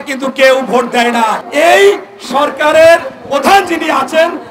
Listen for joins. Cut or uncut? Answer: cut